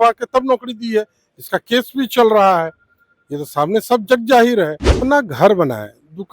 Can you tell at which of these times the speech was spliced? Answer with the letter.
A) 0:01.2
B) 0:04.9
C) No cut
B